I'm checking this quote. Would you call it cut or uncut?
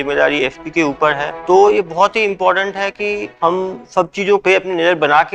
cut